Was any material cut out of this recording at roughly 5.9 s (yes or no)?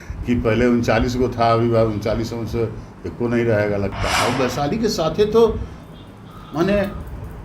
no